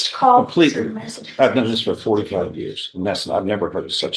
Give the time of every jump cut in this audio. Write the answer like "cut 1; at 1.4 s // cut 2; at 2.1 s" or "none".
none